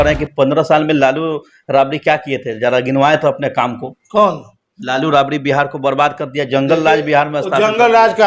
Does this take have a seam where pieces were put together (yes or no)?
no